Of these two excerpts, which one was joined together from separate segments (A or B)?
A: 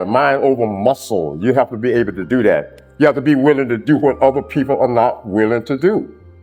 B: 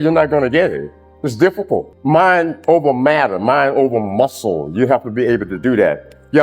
B